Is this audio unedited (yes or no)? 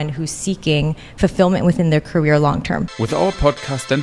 yes